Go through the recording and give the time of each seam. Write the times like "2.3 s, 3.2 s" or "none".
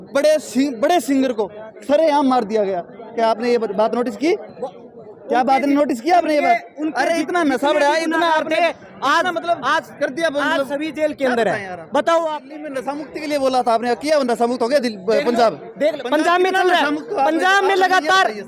12.4 s